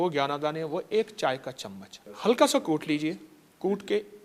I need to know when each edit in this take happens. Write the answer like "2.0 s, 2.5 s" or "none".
none